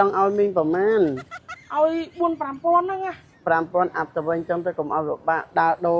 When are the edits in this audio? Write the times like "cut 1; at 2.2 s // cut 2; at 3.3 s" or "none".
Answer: cut 1; at 3.3 s